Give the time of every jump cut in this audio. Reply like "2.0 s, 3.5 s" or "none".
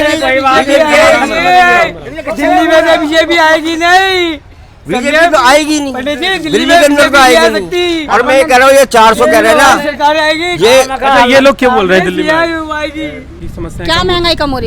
13.4 s